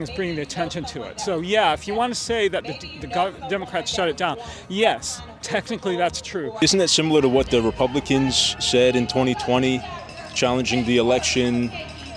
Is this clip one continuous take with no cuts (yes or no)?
no